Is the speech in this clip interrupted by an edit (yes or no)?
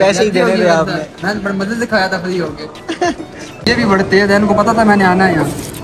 yes